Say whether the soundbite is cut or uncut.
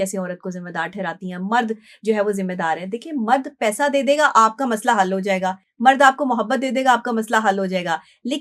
uncut